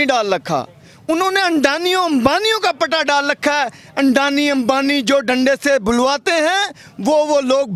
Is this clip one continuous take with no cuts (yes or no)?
yes